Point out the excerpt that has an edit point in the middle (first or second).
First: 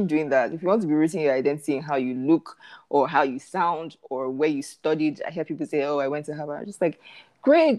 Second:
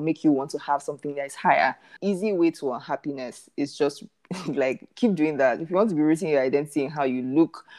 second